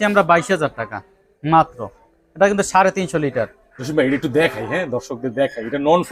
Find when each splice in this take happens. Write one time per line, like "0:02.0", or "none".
none

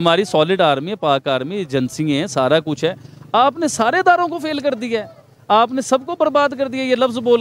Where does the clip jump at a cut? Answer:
none

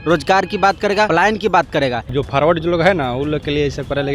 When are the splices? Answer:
0:01.1
0:02.1

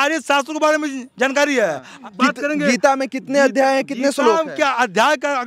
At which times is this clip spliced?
0:02.0

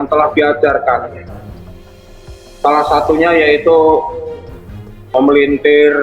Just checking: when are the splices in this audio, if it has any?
0:01.2
0:02.6

